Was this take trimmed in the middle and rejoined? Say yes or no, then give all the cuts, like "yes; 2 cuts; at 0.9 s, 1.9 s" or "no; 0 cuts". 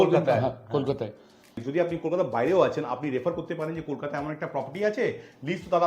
yes; 1 cut; at 1.6 s